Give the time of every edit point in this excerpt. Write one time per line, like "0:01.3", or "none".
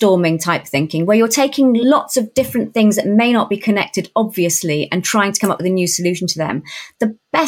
none